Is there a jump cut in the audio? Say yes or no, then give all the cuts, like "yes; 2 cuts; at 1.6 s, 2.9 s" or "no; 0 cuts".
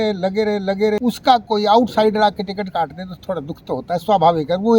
yes; 1 cut; at 1.0 s